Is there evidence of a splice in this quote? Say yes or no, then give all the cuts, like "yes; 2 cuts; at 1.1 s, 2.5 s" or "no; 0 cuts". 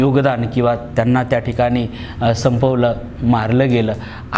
no; 0 cuts